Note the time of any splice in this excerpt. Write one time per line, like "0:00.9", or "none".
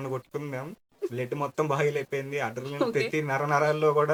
none